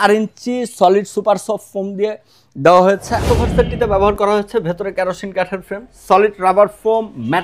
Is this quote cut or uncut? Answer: cut